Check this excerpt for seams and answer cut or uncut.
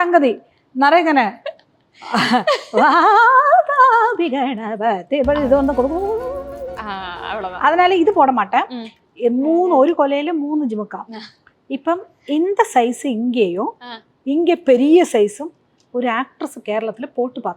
cut